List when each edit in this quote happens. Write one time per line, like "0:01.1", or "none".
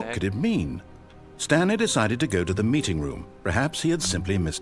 0:01.3